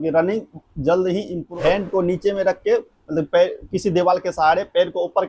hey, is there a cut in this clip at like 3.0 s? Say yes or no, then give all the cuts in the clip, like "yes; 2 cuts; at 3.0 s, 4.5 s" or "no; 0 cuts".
no; 1 cut; at 1.4 s